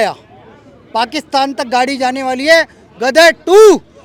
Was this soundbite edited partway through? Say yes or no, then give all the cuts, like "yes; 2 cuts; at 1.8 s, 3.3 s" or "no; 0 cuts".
no; 0 cuts